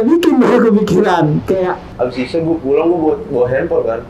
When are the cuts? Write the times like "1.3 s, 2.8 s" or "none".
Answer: 1.8 s